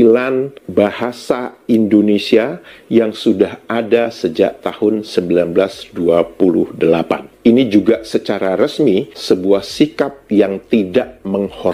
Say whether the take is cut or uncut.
uncut